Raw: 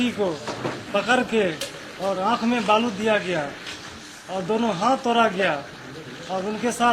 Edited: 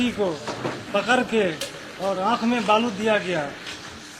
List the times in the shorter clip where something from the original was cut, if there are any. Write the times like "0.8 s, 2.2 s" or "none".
none